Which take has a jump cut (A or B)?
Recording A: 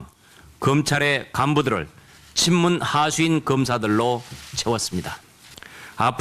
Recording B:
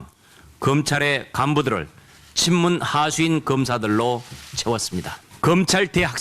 B